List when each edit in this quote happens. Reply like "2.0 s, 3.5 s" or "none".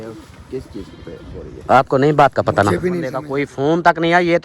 3.2 s